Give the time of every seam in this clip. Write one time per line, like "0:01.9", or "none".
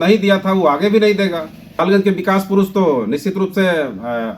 0:01.8